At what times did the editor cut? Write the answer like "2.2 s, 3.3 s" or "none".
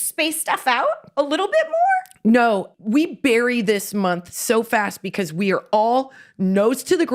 2.7 s